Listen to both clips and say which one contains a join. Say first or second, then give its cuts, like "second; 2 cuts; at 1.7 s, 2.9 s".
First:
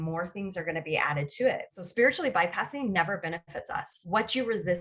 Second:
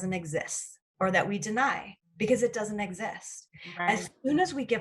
first; 1 cut; at 1.8 s